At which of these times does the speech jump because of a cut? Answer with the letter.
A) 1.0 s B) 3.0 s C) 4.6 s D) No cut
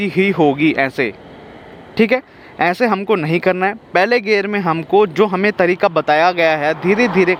D